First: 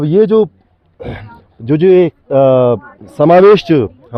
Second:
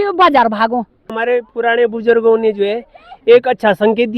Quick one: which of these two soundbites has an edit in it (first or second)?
second